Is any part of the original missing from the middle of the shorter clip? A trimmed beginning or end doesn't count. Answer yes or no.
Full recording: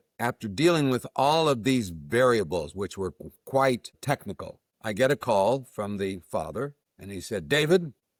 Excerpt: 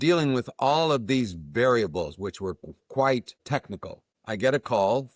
no